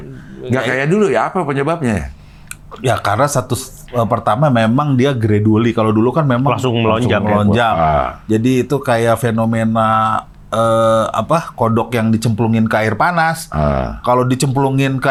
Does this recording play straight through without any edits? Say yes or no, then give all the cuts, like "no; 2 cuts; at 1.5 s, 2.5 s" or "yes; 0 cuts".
yes; 0 cuts